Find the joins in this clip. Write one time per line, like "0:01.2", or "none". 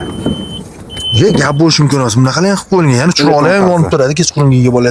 none